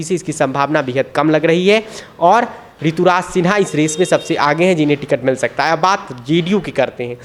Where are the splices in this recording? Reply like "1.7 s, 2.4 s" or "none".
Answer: none